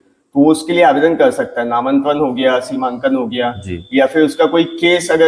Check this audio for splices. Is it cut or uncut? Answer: uncut